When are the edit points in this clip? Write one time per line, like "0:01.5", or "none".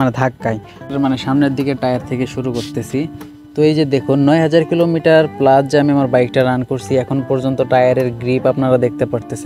0:00.9